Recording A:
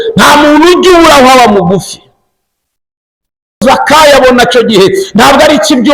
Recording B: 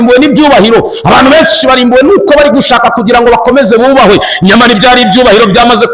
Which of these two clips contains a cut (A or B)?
A